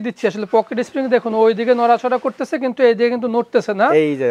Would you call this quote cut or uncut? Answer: uncut